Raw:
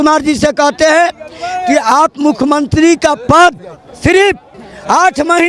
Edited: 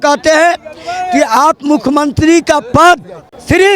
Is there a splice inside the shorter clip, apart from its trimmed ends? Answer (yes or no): no